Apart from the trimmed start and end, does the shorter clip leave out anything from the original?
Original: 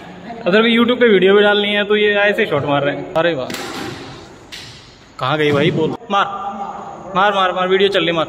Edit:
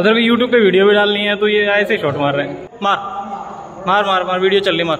yes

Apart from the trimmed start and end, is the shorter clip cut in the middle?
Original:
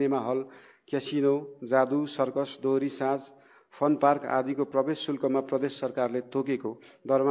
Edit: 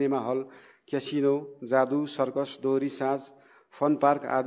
no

